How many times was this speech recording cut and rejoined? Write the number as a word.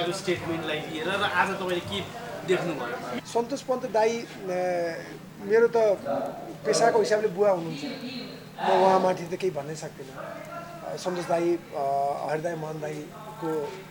one